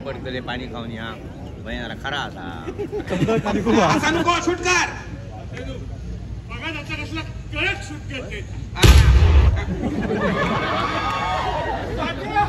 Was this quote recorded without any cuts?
no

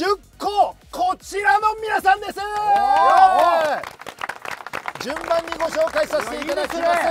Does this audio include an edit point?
no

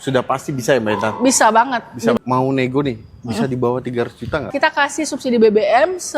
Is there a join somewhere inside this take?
yes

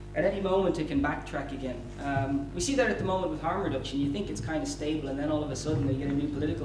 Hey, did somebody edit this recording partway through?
yes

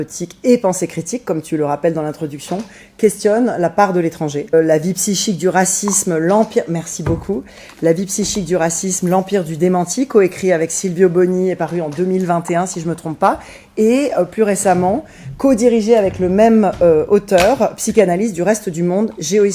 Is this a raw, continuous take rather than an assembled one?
no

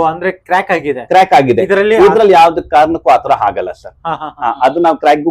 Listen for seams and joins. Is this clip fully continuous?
yes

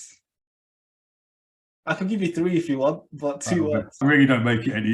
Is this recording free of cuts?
no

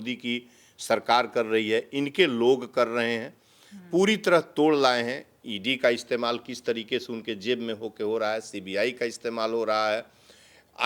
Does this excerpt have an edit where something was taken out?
no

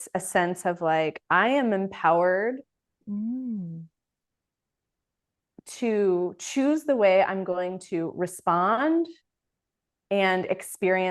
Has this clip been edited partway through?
no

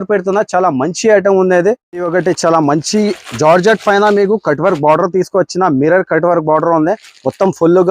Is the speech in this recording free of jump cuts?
no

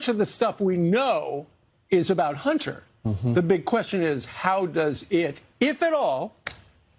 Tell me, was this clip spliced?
no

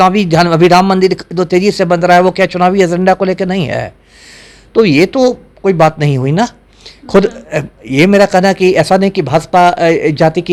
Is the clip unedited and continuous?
yes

